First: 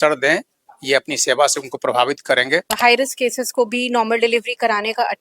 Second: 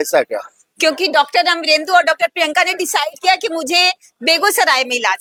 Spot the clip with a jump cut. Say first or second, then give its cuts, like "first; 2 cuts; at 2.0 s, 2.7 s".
first; 1 cut; at 2.7 s